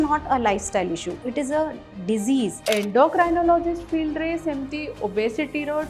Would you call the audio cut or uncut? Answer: cut